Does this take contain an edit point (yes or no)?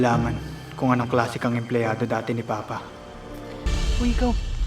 yes